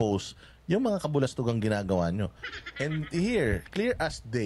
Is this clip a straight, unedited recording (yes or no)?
yes